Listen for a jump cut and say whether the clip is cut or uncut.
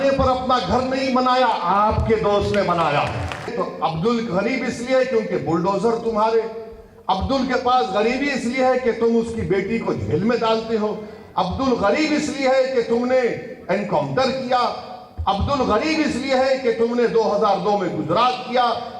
cut